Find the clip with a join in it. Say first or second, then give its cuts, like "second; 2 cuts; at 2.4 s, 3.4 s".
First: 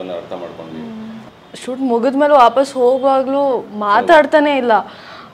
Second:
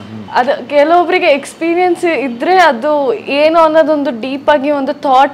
first; 1 cut; at 1.3 s